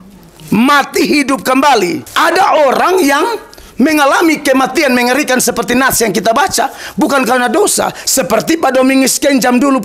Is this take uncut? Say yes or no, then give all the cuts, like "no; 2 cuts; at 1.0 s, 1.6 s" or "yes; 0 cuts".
no; 1 cut; at 2.0 s